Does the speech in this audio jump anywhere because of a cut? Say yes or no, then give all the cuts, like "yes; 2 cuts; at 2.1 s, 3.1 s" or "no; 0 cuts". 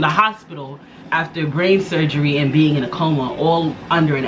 no; 0 cuts